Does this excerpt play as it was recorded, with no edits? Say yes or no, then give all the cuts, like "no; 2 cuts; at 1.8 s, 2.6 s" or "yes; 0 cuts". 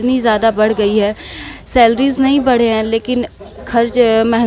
yes; 0 cuts